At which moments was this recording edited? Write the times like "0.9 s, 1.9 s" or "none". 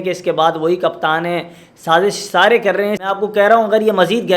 3.0 s